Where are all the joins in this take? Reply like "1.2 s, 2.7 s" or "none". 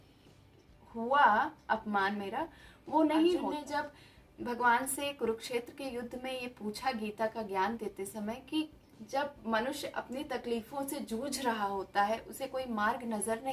3.6 s

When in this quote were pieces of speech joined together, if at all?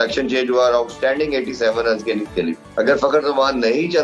2.6 s

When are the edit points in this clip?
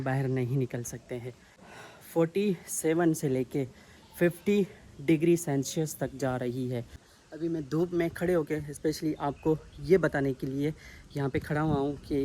1.5 s, 7.0 s

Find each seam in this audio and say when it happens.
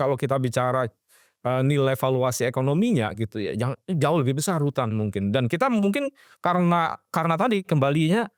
none

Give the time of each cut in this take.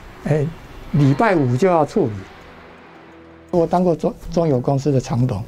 3.2 s

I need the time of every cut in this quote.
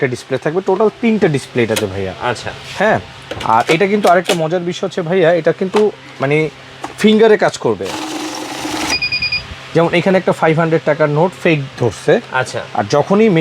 none

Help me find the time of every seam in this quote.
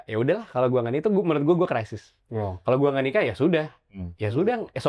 none

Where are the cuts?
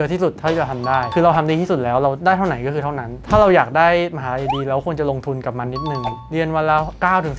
1.1 s, 3.1 s

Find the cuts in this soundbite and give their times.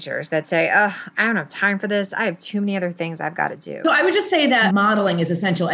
3.8 s, 4.6 s

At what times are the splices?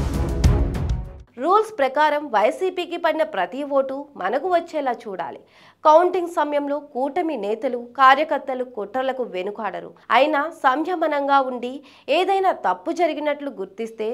1.1 s

